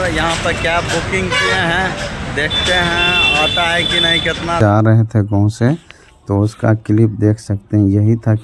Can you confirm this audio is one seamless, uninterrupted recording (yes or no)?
no